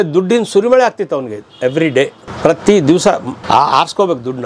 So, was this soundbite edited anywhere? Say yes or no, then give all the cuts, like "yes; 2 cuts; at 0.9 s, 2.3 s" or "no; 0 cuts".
yes; 1 cut; at 3.3 s